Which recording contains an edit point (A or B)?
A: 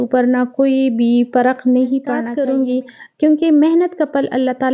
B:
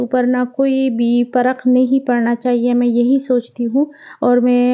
A